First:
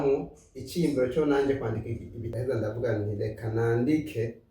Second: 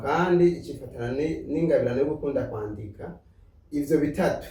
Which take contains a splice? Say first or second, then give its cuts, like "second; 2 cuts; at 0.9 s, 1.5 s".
first; 1 cut; at 2.2 s